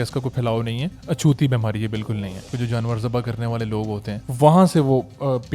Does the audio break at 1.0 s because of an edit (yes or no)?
no